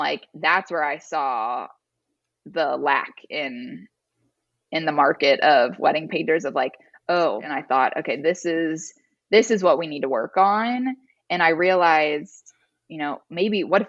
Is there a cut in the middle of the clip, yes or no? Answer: yes